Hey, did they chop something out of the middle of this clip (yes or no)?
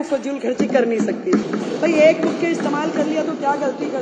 yes